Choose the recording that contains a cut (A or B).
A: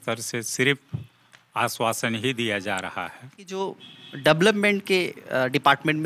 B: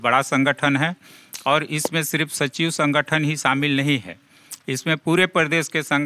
A